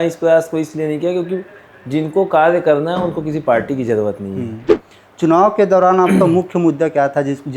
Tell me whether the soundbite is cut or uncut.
cut